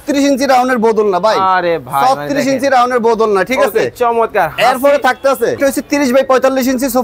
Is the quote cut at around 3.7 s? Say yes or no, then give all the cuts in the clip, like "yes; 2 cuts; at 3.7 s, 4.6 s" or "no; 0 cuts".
no; 1 cut; at 5.6 s